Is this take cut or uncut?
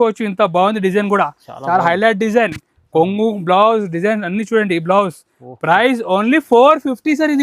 uncut